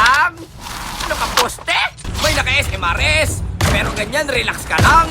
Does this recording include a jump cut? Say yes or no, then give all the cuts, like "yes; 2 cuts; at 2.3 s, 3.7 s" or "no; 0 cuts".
yes; 1 cut; at 2.1 s